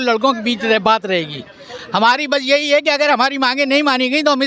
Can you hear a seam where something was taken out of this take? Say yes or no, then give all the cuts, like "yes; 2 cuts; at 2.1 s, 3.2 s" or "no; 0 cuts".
no; 0 cuts